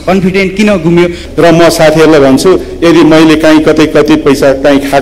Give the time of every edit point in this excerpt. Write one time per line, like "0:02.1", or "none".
0:01.2